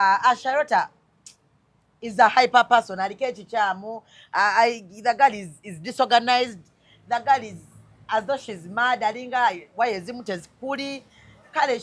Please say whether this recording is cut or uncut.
uncut